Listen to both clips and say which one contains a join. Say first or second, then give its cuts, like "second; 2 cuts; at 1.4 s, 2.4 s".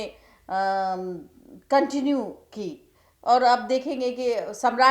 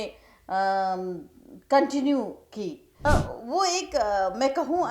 second; 1 cut; at 2.8 s